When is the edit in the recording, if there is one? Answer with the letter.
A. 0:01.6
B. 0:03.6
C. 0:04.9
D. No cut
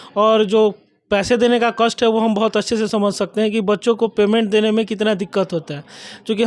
D